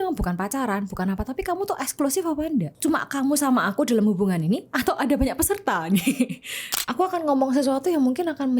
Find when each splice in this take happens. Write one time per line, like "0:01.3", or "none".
0:02.7
0:06.3

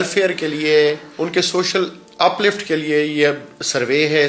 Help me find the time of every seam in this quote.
0:01.1

